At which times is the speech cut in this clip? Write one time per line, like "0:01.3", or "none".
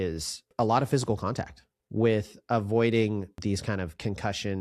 none